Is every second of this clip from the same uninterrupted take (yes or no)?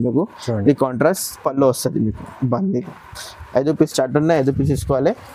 yes